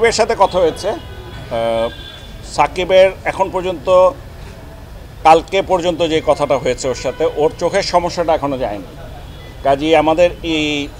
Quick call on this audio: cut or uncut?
uncut